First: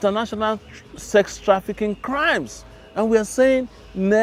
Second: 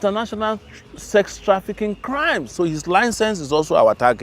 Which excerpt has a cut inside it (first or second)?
second